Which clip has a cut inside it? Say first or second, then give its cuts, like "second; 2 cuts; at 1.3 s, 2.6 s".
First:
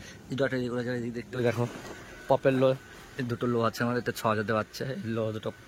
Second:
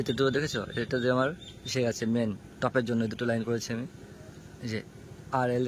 first; 1 cut; at 1.4 s